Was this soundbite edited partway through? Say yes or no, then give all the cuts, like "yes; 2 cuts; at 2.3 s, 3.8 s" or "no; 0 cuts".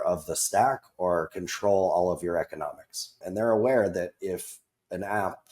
yes; 1 cut; at 3.2 s